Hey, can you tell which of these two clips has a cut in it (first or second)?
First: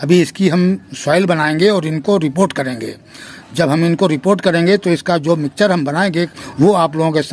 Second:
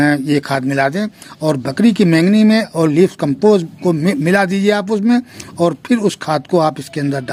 first